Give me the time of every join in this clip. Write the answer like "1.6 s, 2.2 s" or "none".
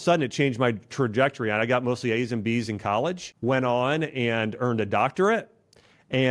3.3 s